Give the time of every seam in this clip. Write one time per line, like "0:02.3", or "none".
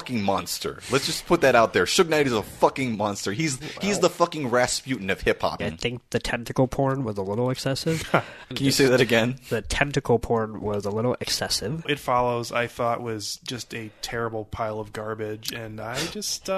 0:05.6
0:08.5
0:11.9